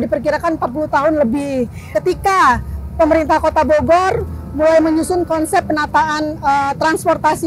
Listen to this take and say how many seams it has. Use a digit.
1